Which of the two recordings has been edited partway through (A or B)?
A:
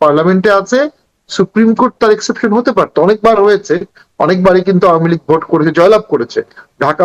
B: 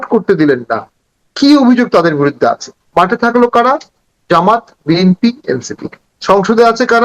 B